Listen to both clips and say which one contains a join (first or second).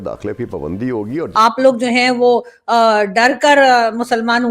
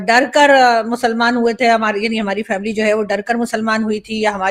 first